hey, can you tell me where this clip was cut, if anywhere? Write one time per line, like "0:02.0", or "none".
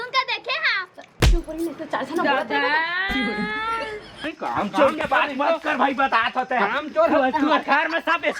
0:04.2